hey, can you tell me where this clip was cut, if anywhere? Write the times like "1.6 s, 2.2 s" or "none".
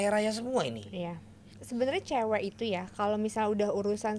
1.5 s

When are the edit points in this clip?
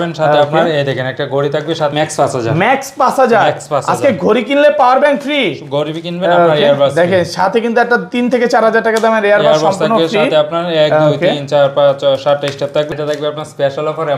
1.9 s, 12.9 s

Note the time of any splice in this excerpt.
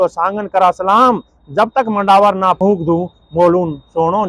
2.6 s

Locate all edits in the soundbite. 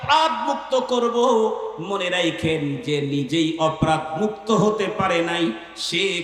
none

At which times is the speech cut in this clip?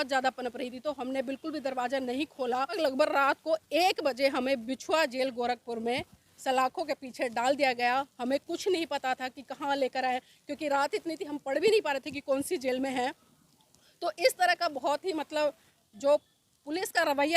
2.8 s

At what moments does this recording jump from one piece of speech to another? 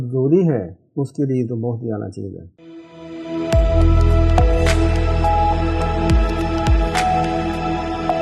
none

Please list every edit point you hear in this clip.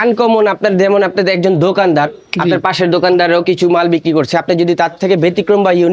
none

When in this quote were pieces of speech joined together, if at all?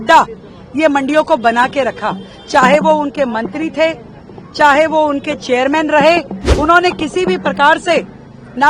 6.4 s

